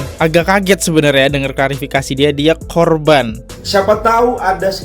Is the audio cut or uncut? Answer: cut